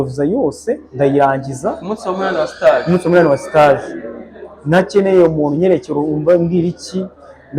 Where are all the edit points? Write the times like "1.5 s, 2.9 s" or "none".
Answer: none